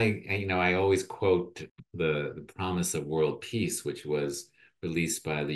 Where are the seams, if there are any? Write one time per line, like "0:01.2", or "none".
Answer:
0:01.6